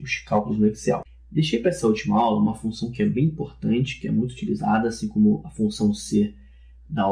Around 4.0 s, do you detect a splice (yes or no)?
yes